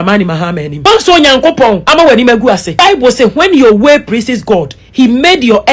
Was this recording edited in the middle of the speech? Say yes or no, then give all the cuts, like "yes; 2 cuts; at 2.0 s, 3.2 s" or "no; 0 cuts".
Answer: no; 0 cuts